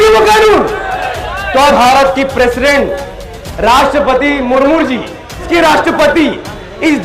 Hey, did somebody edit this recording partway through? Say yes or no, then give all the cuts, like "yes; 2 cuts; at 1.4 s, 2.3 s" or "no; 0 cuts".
yes; 2 cuts; at 1.7 s, 5.5 s